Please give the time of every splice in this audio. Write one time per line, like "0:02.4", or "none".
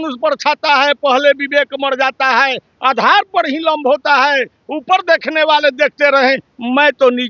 none